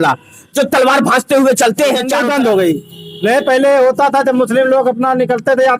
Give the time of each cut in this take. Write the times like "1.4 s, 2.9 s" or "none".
2.2 s